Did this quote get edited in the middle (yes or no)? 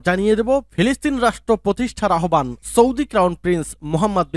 no